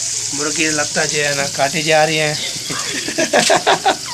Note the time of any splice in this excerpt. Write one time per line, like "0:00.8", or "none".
none